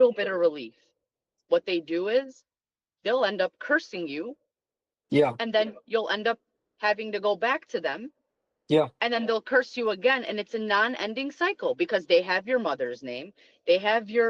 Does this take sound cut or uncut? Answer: uncut